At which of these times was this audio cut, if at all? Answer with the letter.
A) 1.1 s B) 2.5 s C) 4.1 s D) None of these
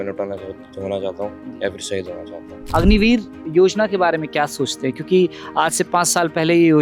B